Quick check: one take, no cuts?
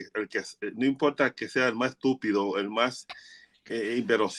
yes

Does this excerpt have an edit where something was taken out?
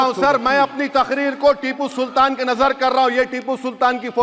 no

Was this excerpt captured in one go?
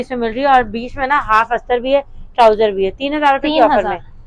yes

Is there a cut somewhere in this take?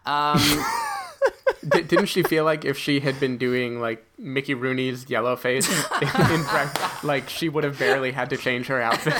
yes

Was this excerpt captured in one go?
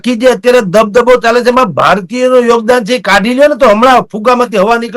yes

